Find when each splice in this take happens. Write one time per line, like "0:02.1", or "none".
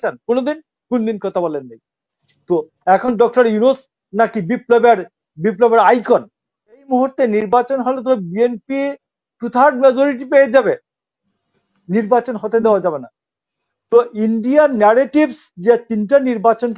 0:06.9